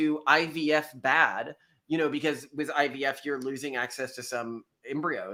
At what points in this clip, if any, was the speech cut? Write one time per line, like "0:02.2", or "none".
none